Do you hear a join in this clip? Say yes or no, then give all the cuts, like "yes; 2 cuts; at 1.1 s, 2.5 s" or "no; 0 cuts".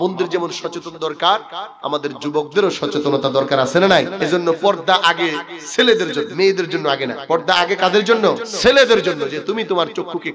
yes; 4 cuts; at 4.2 s, 6.3 s, 7.2 s, 8.5 s